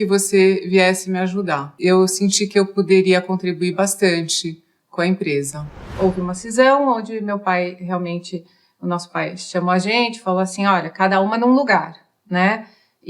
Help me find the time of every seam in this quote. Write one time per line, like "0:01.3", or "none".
0:01.7
0:05.8